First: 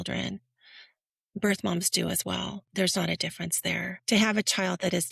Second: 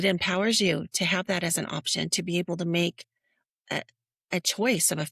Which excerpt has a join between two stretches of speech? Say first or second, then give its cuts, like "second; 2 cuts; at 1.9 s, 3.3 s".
first; 2 cuts; at 2.6 s, 3.9 s